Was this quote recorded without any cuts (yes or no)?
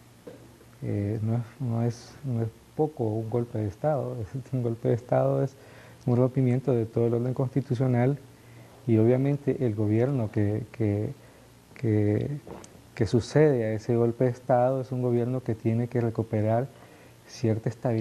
no